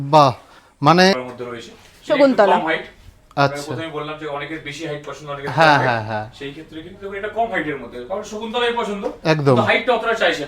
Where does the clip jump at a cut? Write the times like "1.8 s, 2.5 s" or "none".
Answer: 1.1 s